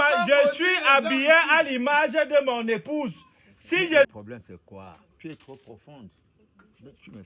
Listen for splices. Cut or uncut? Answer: cut